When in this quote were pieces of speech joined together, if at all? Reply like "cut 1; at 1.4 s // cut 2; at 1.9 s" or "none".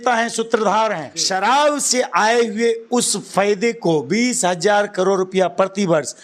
cut 1; at 1.1 s